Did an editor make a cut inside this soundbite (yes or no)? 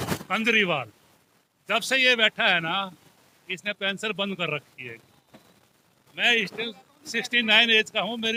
no